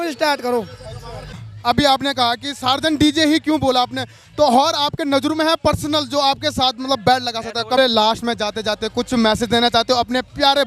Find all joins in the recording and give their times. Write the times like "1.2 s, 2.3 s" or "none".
1.2 s, 7.8 s